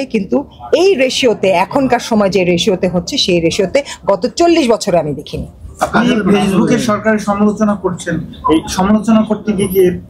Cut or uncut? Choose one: uncut